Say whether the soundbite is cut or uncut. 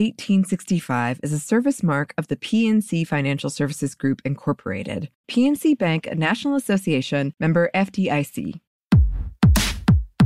cut